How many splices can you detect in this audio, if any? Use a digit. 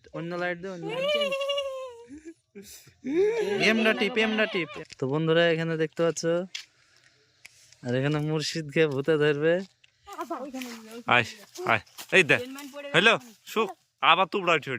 2